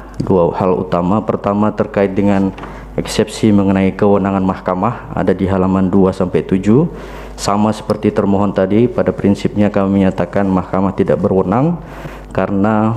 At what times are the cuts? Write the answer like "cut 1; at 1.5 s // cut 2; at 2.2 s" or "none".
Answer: none